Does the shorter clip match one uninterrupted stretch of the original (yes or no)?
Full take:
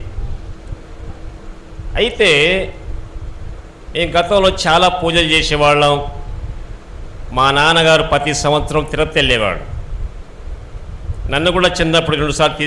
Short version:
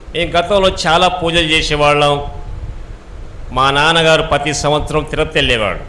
yes